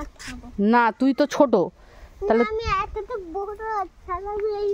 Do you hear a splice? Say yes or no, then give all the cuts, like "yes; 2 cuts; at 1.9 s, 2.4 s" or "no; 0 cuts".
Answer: no; 0 cuts